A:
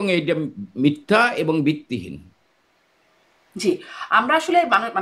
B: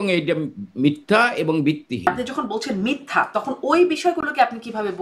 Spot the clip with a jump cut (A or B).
B